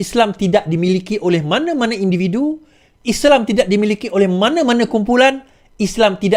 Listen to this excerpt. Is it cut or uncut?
uncut